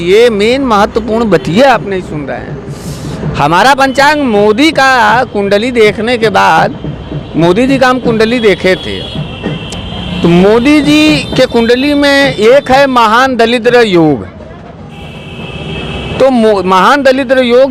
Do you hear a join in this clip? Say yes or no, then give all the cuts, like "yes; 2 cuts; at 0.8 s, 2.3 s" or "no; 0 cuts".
no; 0 cuts